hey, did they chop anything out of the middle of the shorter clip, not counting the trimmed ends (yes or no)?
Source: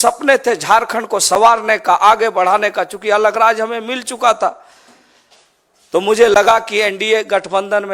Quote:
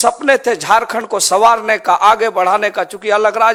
no